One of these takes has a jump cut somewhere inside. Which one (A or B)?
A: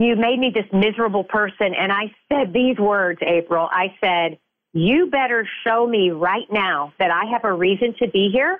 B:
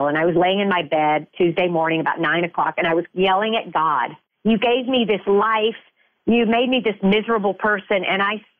B